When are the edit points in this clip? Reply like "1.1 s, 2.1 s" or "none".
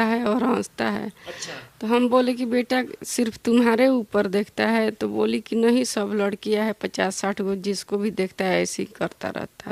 none